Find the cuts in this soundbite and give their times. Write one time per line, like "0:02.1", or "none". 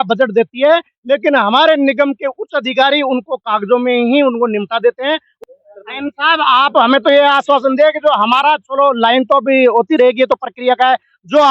0:05.3
0:06.8